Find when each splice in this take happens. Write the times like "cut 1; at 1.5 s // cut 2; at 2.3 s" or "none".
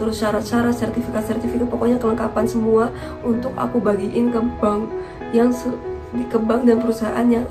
none

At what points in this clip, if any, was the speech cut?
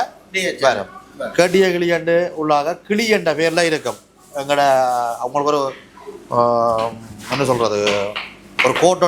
none

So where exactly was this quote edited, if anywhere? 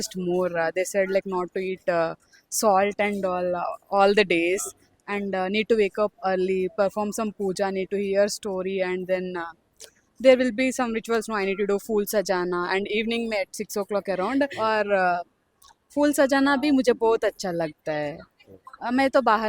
cut 1; at 14.5 s

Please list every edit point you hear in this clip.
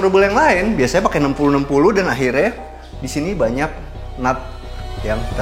none

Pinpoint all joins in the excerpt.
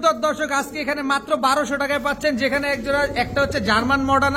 none

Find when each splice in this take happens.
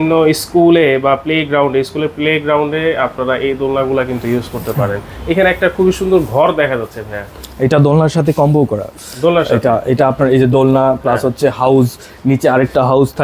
none

